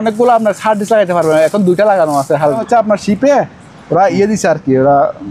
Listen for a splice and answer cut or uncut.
cut